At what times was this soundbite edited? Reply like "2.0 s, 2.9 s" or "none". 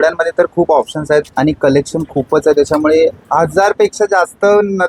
1.3 s

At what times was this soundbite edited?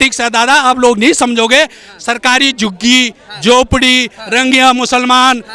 none

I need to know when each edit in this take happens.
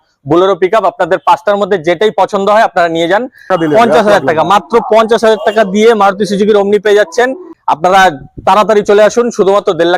3.5 s, 7.6 s

